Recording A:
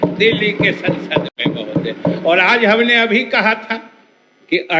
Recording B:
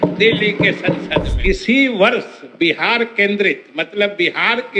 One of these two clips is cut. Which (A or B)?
B